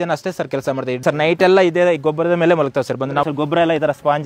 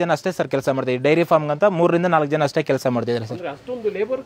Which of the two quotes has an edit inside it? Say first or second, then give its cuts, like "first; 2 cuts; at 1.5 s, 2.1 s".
first; 2 cuts; at 1.0 s, 3.2 s